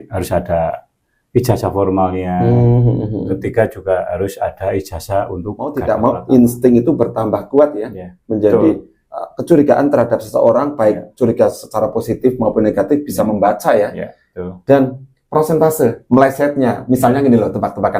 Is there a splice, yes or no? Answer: yes